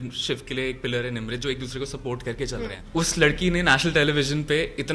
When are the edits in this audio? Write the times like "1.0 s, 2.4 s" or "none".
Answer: 2.8 s